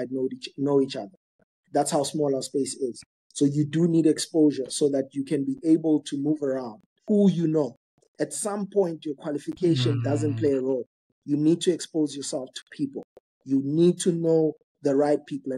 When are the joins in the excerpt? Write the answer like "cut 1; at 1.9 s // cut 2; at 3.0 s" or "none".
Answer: cut 1; at 6.9 s